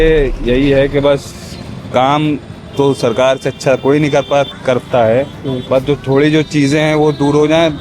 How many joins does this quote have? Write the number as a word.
zero